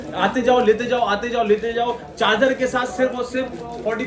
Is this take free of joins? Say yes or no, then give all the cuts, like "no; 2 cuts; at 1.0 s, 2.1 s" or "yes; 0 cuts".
yes; 0 cuts